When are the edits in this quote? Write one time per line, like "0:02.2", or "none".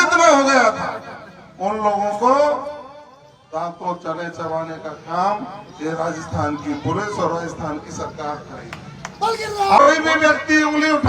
0:09.8